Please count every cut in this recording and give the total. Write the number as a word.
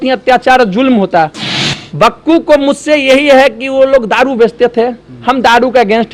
one